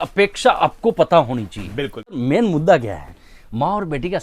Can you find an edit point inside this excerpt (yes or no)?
yes